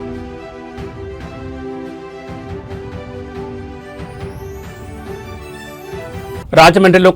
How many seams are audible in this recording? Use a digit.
2